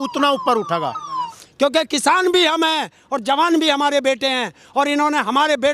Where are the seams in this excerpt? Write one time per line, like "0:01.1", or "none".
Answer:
0:01.3